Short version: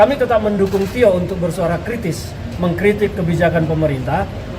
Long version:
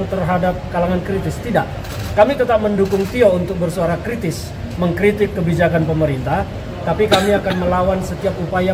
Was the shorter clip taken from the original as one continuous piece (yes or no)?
yes